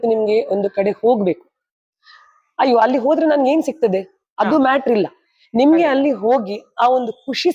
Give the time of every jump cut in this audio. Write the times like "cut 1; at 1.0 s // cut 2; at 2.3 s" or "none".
none